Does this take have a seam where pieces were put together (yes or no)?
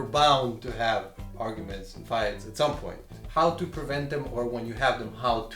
no